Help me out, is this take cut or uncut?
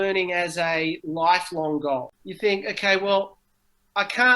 cut